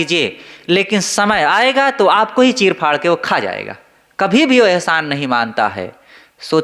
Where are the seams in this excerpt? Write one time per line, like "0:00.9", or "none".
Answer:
none